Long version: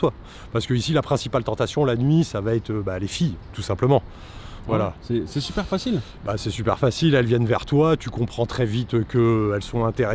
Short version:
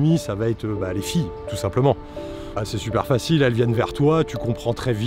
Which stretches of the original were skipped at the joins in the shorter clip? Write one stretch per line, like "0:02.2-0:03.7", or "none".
0:04.5-0:06.2